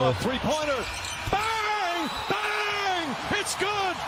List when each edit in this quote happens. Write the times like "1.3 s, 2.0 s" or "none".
none

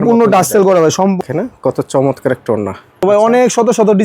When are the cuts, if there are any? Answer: 1.2 s, 3.0 s

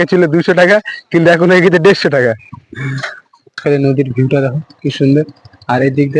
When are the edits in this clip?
3.6 s

